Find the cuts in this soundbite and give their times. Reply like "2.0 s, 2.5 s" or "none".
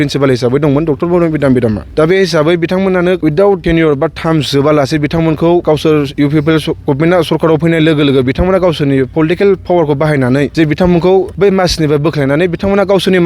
1.8 s, 3.4 s, 5.6 s, 10.5 s, 11.3 s